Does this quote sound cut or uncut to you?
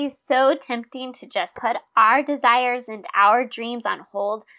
cut